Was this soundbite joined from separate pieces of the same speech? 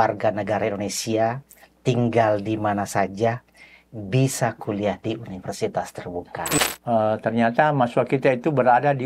yes; 1 cut; at 6.6 s

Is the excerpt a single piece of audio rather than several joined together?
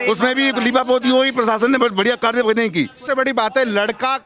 no; 1 cut; at 3.0 s

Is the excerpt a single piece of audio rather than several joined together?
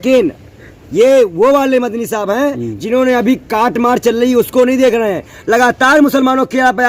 yes; 0 cuts

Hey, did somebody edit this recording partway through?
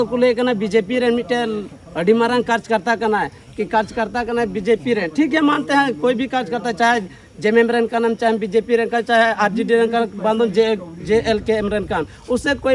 no; 0 cuts

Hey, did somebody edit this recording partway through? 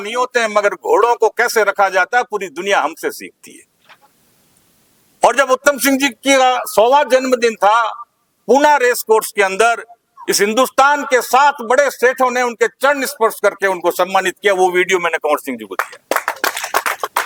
no; 0 cuts

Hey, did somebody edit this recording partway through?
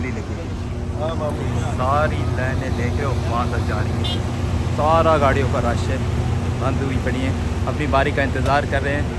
no; 0 cuts

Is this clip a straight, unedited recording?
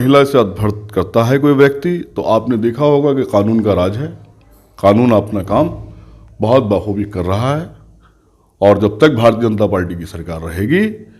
yes; 0 cuts

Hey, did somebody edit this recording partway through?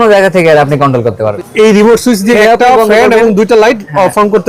yes; 2 cuts; at 1.3 s, 2.4 s

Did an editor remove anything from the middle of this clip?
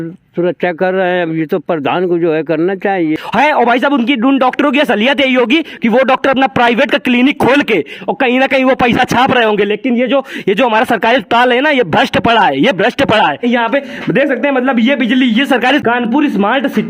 yes; 3 cuts; at 3.2 s, 13.4 s, 15.8 s

